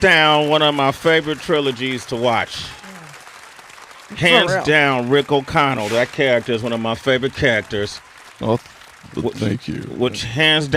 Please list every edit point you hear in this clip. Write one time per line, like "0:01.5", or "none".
none